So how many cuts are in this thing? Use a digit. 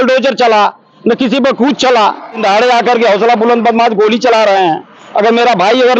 1